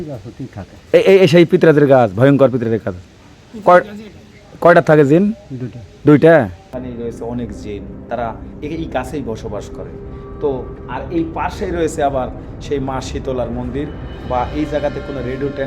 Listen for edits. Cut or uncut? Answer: cut